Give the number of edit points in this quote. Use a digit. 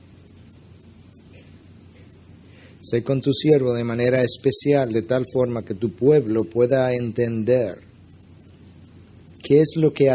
1